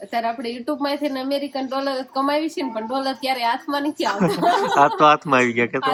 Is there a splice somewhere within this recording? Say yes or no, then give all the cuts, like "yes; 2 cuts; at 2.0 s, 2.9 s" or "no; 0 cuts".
no; 0 cuts